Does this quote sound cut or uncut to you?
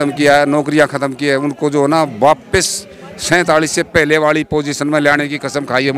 uncut